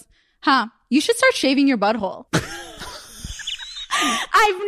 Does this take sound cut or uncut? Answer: uncut